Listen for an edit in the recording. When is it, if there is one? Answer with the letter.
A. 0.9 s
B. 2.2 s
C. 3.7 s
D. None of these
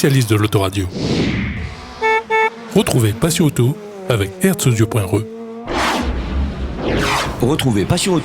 A